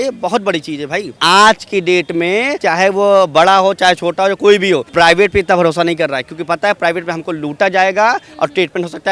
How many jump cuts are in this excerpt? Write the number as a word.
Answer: three